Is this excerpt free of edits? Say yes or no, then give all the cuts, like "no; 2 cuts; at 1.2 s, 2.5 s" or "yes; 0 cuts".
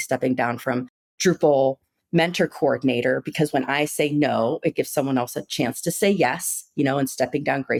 yes; 0 cuts